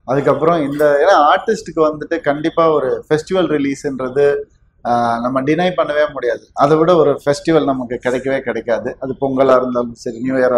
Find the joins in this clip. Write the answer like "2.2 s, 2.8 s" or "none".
none